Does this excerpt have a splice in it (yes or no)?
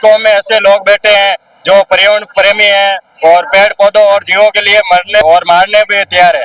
no